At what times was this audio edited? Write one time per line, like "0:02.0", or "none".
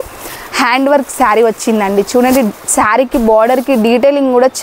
none